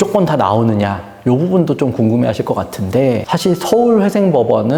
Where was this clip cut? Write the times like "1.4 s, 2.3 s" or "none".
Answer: none